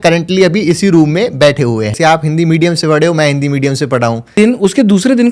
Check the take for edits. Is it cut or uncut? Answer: cut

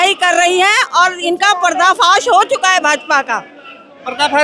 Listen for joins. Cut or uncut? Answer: uncut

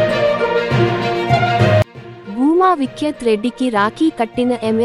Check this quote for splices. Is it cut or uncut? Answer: uncut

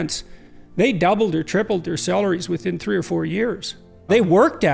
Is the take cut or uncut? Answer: uncut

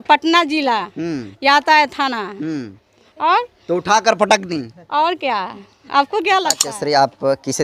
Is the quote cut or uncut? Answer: cut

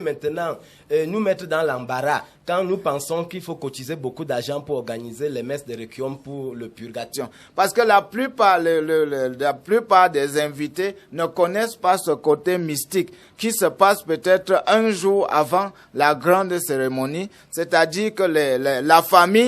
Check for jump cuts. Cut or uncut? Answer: cut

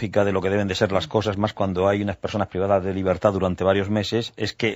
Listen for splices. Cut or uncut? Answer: uncut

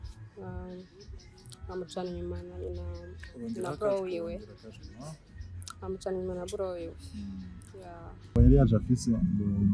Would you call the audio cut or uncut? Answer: cut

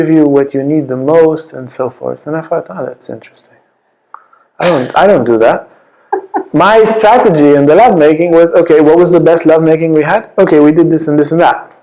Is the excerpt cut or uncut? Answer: uncut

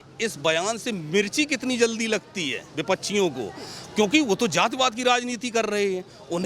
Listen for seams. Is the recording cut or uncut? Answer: uncut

